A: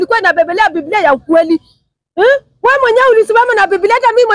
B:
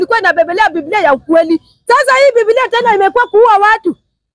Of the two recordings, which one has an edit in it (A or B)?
B